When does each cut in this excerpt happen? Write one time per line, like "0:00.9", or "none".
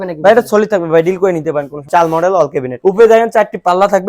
0:01.8
0:02.7